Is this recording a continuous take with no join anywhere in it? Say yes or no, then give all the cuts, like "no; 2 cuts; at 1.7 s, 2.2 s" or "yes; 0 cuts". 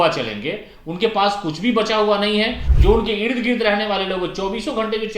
no; 1 cut; at 2.7 s